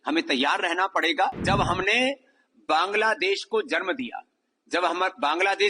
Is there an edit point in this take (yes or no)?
yes